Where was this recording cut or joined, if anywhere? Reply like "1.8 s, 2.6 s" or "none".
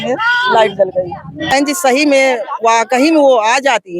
1.5 s